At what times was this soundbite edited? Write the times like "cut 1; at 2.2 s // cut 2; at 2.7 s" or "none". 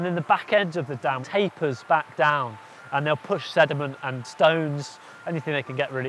cut 1; at 1.2 s // cut 2; at 4.2 s

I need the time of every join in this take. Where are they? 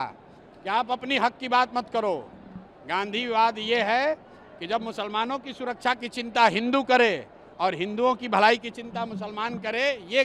none

